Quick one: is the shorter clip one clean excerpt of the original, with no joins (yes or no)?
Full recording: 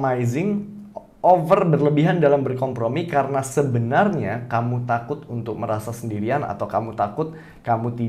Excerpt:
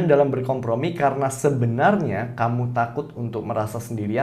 yes